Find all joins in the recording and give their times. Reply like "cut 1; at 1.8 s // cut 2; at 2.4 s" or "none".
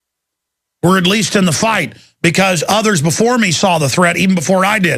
none